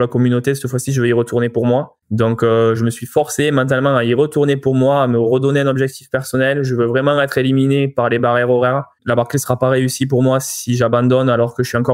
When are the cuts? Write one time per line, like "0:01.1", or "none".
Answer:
0:02.0
0:09.0